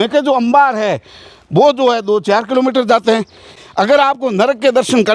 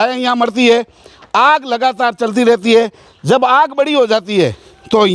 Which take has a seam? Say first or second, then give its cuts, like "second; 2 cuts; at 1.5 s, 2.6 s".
first; 1 cut; at 3.5 s